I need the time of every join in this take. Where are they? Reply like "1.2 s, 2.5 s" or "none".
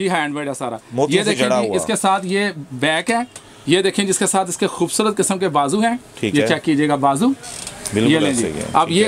none